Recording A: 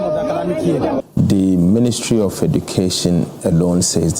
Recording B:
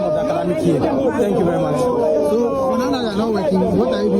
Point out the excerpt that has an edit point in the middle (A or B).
A